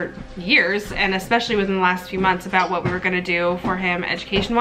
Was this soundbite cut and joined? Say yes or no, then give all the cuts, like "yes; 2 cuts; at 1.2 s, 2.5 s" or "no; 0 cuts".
no; 0 cuts